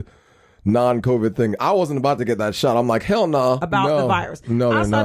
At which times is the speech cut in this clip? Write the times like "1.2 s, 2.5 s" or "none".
3.6 s